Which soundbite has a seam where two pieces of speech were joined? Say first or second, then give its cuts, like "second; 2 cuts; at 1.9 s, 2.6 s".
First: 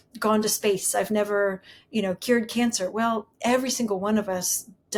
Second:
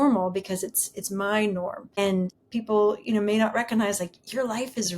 second; 1 cut; at 2.3 s